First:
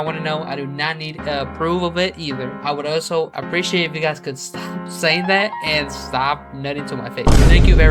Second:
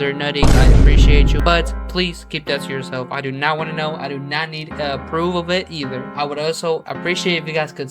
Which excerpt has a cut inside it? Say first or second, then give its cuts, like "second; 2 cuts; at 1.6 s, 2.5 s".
second; 1 cut; at 1.4 s